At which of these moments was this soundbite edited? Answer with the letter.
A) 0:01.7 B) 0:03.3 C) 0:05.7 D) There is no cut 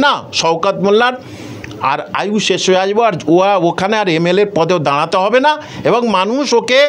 D